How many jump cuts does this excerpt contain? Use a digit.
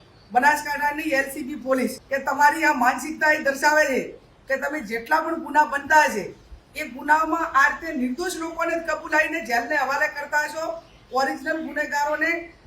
1